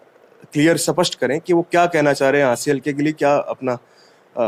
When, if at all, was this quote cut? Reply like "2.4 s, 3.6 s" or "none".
none